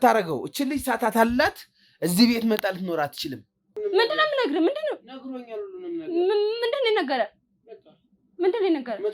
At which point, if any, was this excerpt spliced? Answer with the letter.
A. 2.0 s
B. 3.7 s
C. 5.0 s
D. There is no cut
B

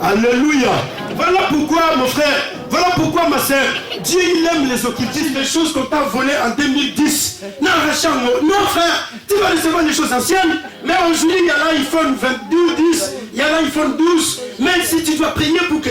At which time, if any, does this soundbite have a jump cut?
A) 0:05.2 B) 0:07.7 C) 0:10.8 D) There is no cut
A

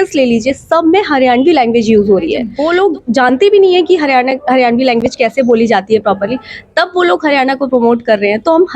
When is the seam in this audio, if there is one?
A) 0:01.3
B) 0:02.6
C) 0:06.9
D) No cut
B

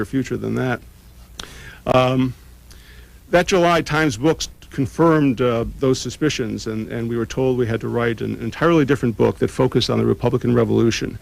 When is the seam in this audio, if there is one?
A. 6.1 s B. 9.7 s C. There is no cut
A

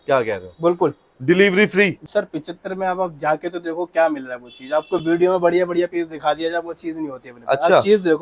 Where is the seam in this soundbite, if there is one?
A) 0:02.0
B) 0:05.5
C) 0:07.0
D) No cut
A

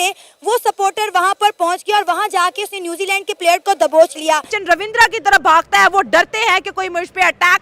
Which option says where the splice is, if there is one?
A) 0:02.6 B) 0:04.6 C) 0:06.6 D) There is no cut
B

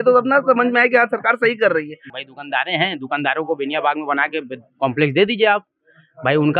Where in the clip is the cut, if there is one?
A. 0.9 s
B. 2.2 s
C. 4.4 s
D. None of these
B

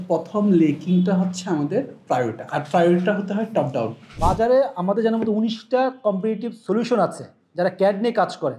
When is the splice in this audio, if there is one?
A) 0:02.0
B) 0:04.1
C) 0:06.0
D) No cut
B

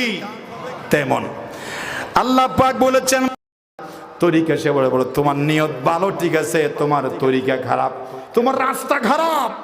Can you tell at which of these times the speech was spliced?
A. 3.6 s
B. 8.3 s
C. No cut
A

